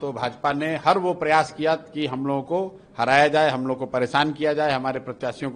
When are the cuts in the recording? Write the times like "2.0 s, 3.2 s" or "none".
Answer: none